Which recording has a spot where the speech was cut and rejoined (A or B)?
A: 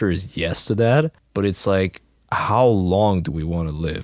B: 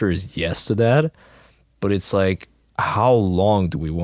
A